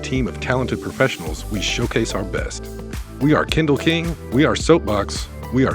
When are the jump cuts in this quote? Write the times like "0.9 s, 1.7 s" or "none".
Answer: none

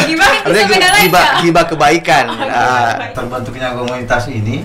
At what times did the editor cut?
3.1 s

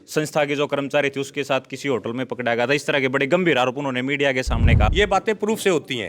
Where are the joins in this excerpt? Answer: 4.9 s

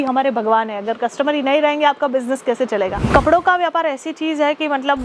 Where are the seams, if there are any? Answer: 3.0 s

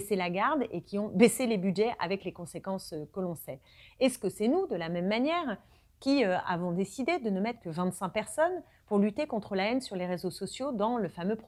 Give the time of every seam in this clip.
none

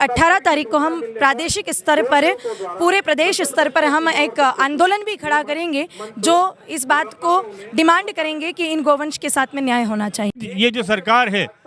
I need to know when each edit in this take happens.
10.4 s

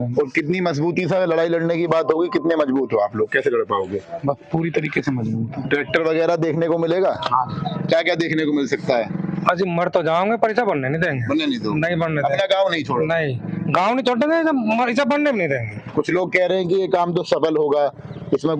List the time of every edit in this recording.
none

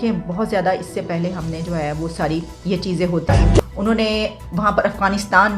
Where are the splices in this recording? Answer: 3.3 s

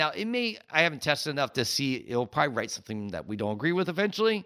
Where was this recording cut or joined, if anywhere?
none

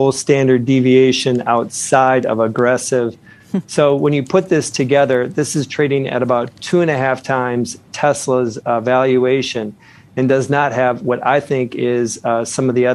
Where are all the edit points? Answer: 3.3 s

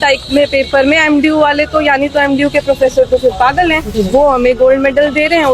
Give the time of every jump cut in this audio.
none

